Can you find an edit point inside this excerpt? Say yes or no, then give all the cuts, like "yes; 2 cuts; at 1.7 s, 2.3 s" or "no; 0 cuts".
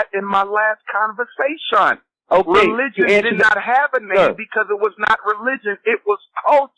no; 0 cuts